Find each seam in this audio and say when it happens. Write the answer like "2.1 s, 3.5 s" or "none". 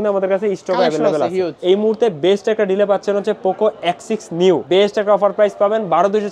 1.5 s, 4.6 s